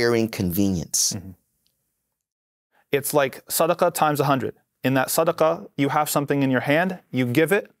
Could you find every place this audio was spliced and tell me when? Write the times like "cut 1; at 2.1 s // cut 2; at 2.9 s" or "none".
cut 1; at 2.6 s